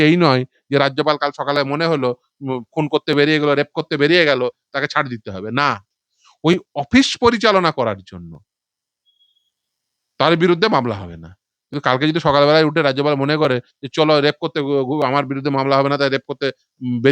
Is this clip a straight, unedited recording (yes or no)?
yes